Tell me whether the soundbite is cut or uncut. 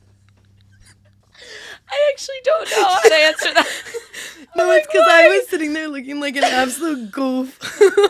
cut